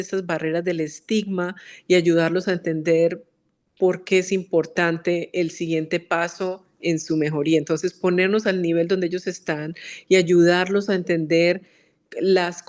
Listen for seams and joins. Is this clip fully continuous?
yes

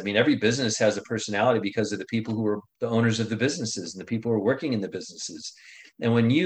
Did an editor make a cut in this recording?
yes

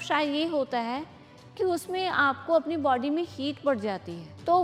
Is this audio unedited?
yes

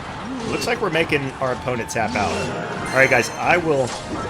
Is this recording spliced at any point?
yes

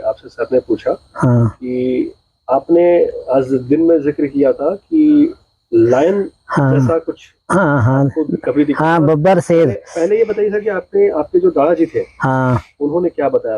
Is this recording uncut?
yes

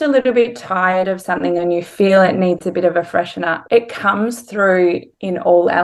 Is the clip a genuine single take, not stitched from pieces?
yes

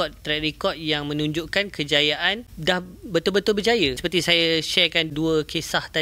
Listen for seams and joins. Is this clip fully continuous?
no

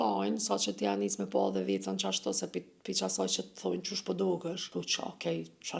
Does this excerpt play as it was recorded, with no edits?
no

